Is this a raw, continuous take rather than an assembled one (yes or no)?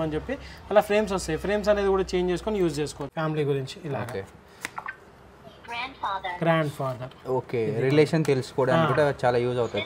no